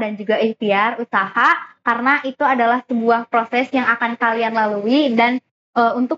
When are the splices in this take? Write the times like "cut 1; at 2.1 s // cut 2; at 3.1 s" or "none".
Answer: none